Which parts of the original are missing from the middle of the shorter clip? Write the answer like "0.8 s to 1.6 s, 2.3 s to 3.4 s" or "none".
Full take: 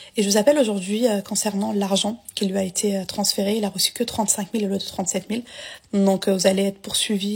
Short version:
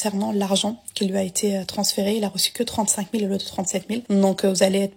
5.4 s to 5.9 s